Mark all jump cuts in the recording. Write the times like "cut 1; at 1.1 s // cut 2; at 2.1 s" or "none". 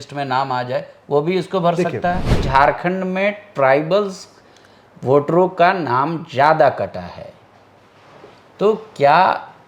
cut 1; at 2.4 s